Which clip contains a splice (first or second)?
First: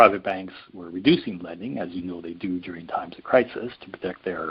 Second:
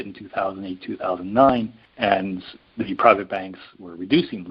second